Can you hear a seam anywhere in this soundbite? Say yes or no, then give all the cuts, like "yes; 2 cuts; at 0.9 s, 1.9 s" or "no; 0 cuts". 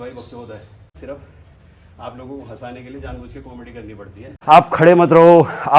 yes; 2 cuts; at 0.9 s, 4.3 s